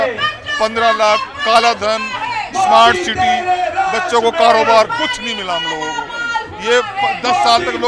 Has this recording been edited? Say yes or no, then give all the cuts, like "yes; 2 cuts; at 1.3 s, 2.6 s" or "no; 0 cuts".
no; 0 cuts